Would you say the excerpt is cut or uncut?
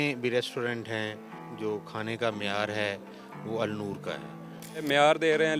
cut